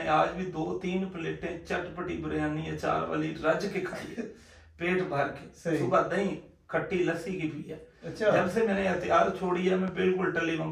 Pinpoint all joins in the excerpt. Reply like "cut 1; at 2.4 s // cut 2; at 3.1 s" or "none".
none